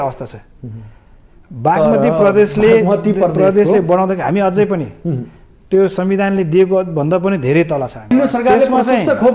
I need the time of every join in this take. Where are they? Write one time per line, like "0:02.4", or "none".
0:08.1